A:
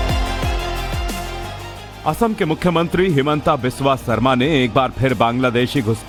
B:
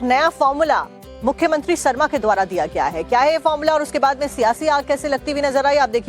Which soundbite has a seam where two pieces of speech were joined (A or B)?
B